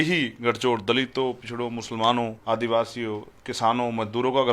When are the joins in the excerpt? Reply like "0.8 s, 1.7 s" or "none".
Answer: 2.4 s